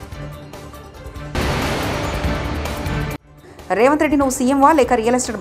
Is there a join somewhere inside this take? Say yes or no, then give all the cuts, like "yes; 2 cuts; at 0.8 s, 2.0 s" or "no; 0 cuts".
yes; 2 cuts; at 1.2 s, 3.2 s